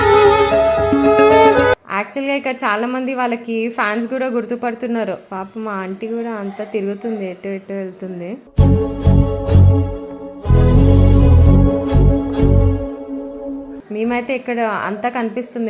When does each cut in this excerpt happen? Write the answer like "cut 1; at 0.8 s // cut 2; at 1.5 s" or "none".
none